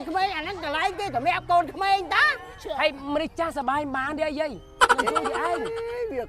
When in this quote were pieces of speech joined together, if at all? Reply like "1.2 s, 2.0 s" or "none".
none